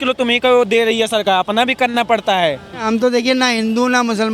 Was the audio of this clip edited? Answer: yes; 1 cut; at 2.7 s

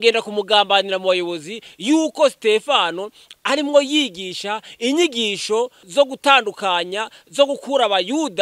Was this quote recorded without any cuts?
no; 1 cut; at 5.8 s

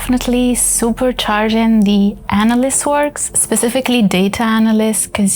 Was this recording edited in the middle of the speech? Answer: yes; 1 cut; at 3.3 s

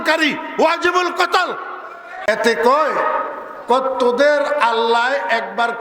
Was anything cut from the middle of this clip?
yes; 1 cut; at 2.3 s

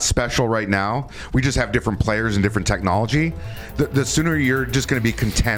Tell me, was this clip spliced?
no; 0 cuts

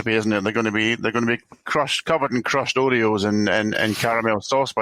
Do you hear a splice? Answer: no; 0 cuts

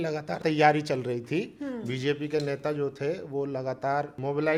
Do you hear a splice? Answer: no; 0 cuts

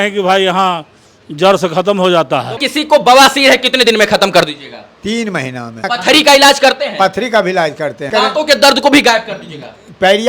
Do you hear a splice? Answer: yes; 3 cuts; at 2.6 s, 5.8 s, 8.1 s

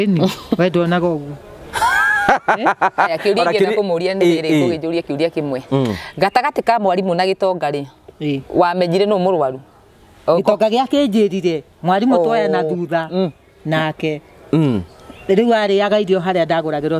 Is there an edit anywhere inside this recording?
no; 0 cuts

